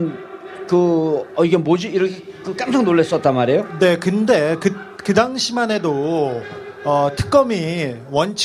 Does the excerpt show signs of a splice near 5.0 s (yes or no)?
yes